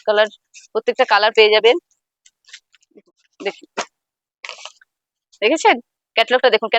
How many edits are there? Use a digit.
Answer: 1